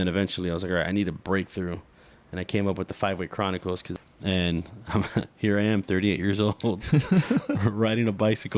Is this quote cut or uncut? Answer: cut